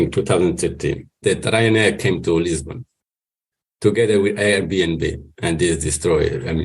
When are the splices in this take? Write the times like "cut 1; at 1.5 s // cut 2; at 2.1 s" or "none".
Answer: cut 1; at 1.2 s

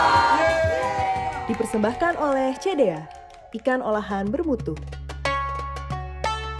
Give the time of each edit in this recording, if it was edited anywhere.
cut 1; at 5.2 s

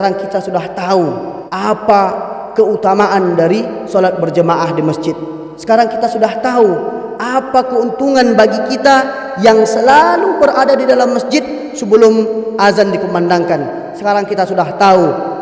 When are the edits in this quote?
cut 1; at 1.4 s

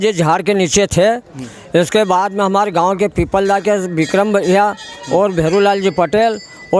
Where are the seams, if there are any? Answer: none

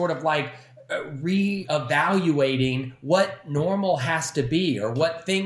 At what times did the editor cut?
cut 1; at 1.6 s

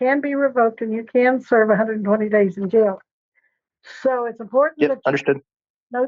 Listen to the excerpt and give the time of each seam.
none

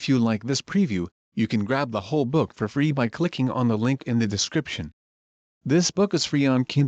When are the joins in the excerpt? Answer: cut 1; at 1.0 s

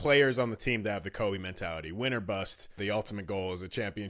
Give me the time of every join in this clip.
cut 1; at 2.7 s

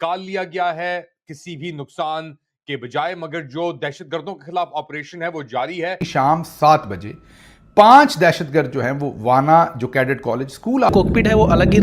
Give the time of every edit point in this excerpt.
cut 1; at 6.0 s // cut 2; at 10.9 s

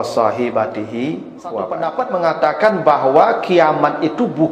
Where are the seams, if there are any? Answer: cut 1; at 1.8 s

